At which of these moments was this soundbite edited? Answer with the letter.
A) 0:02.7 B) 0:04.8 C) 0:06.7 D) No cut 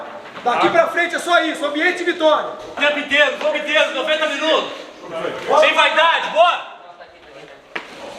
D